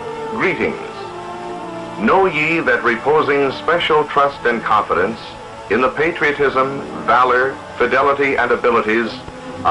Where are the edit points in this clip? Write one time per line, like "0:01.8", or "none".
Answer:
0:05.4